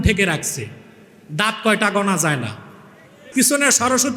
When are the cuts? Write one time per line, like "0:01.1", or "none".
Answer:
0:03.2